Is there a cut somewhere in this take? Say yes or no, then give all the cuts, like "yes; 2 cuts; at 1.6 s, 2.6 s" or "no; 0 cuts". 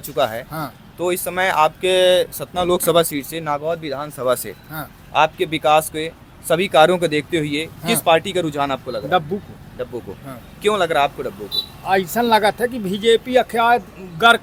no; 0 cuts